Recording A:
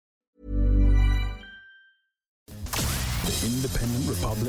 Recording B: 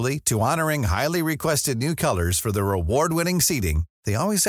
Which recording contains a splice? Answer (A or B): A